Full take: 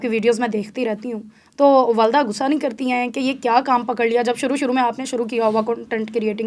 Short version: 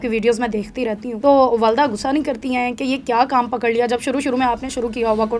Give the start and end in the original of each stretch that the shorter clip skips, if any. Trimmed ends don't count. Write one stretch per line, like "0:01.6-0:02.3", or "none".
0:01.1-0:01.4